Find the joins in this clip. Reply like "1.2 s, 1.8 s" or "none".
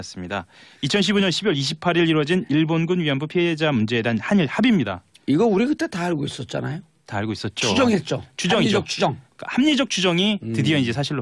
none